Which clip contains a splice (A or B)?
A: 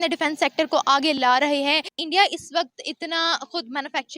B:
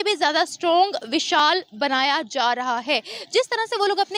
A